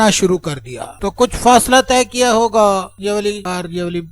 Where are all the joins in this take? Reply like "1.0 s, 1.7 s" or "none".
2.9 s

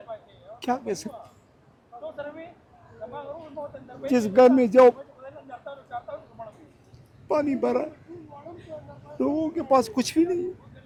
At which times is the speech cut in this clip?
none

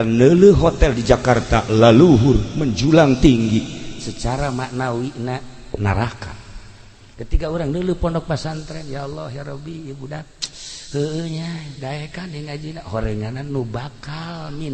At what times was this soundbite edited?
none

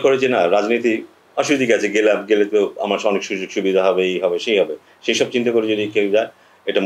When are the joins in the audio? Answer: none

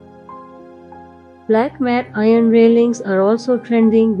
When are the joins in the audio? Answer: 1.5 s

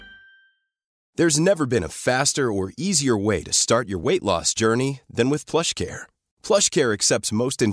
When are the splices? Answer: 1.0 s

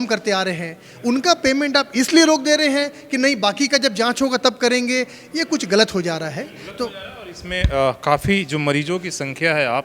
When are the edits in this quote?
none

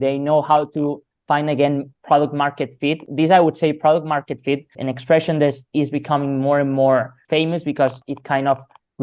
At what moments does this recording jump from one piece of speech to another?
3.0 s, 4.7 s, 7.2 s, 8.0 s

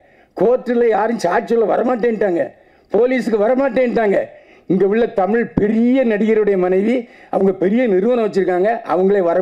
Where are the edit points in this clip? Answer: none

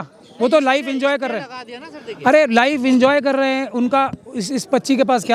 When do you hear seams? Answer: none

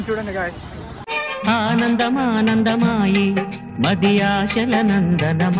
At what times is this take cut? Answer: 1.0 s

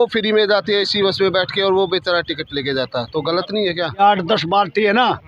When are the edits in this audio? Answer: 4.0 s

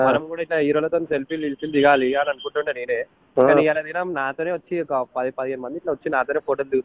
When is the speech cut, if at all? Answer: none

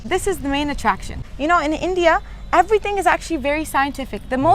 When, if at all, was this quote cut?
1.2 s

